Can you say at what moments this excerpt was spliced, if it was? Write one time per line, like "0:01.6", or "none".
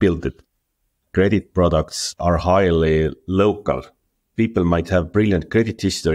0:00.9
0:04.2